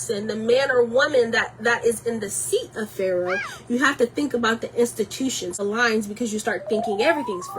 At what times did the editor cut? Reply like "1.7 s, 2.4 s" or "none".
5.6 s